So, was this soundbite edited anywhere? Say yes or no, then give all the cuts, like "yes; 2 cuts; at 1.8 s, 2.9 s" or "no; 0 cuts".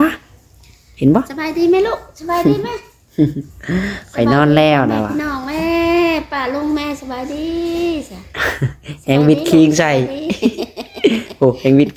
no; 0 cuts